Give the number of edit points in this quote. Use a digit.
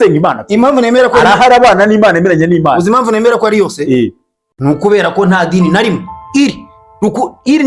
0